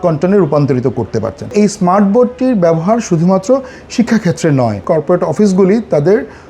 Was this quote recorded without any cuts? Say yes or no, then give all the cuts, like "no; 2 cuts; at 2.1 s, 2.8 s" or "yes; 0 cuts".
no; 2 cuts; at 1.5 s, 4.8 s